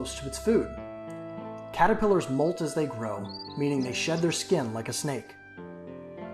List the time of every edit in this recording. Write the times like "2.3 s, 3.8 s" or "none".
5.4 s